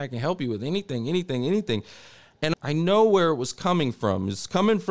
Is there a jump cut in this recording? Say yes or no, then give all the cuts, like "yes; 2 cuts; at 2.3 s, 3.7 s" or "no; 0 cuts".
yes; 1 cut; at 2.5 s